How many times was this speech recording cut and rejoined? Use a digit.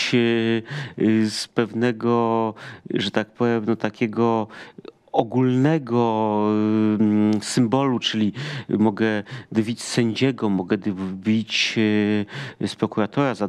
0